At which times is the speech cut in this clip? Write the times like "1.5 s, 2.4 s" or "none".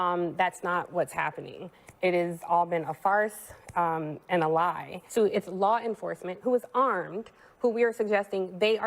4.9 s